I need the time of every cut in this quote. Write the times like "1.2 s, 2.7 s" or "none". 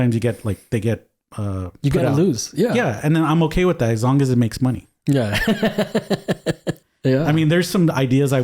6.7 s